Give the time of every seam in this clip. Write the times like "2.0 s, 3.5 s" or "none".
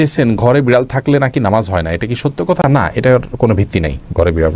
none